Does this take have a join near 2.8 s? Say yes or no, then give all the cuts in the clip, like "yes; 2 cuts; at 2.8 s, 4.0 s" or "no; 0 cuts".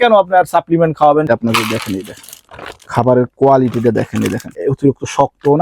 no; 2 cuts; at 1.3 s, 4.6 s